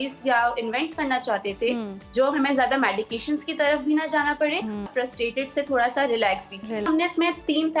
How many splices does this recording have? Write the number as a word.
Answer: two